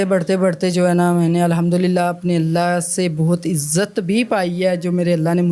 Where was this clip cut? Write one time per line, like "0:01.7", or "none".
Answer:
none